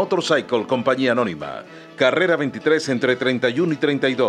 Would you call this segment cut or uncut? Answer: uncut